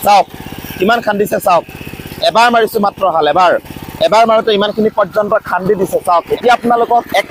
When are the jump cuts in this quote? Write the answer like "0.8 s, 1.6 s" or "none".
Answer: none